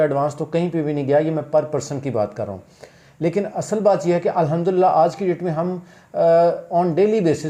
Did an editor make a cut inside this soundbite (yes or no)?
no